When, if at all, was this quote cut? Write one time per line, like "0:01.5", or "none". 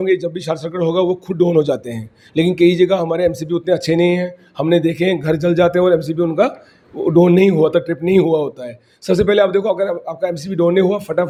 none